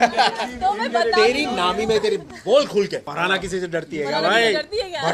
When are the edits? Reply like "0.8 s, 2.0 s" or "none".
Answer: 3.1 s